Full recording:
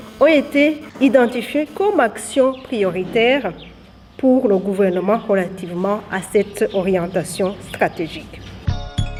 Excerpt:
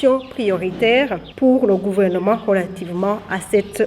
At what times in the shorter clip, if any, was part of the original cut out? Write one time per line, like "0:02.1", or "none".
0:01.2